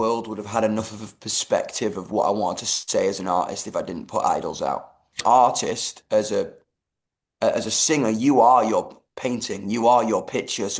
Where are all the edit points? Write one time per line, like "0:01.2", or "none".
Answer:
0:05.2